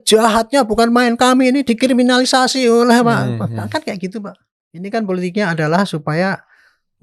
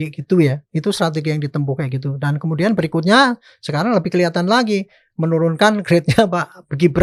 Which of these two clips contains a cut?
first; 1 cut; at 4.9 s

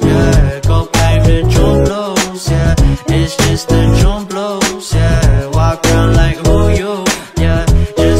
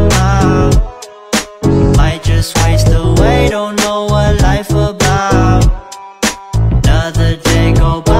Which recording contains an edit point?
first; 1 cut; at 0.9 s

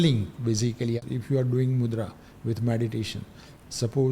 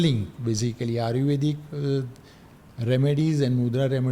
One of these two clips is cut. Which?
first; 1 cut; at 1.0 s

